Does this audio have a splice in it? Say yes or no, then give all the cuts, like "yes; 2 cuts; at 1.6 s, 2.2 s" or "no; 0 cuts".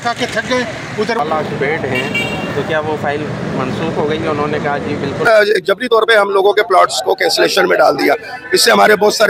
yes; 2 cuts; at 1.2 s, 5.3 s